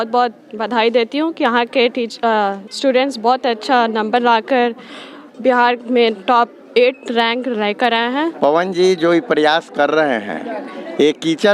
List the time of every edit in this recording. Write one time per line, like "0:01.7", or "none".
0:08.3